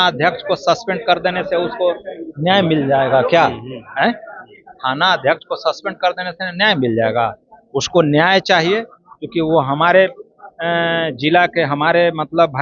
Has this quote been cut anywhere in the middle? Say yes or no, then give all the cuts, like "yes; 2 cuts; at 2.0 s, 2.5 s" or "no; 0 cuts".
no; 0 cuts